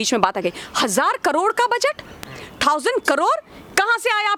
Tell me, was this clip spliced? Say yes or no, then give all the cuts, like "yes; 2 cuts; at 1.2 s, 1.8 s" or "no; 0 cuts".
no; 0 cuts